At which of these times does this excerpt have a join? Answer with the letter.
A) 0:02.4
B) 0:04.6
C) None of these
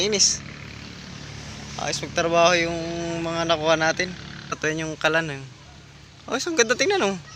B